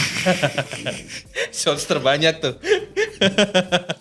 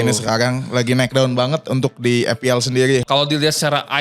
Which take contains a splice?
second; 1 cut; at 3.0 s

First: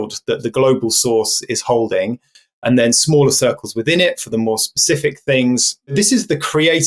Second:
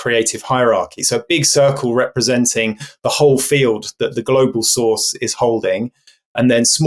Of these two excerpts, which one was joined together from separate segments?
first; 1 cut; at 5.9 s

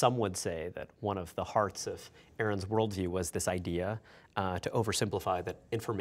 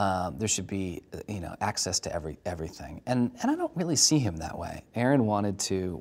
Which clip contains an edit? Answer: second; 1 cut; at 4.8 s

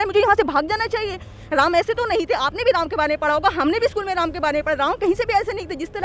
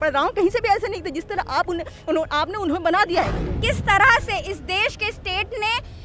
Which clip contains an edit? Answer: second; 1 cut; at 3.6 s

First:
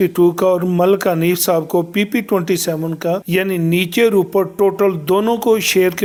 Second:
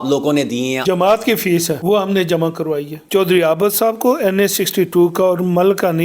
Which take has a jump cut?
second; 3 cuts; at 0.8 s, 1.8 s, 3.0 s

